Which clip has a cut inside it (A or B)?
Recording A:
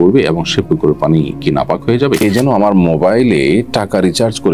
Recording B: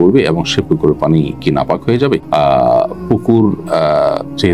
A